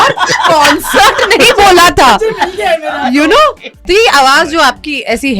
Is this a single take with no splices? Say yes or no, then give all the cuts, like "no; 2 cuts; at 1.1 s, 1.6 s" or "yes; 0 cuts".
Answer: no; 1 cut; at 3.8 s